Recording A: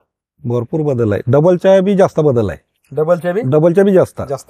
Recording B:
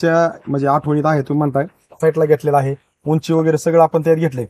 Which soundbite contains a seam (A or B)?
B